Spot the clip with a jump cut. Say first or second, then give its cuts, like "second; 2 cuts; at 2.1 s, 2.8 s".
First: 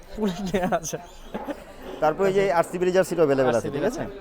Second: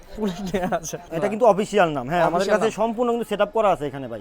second; 1 cut; at 1.1 s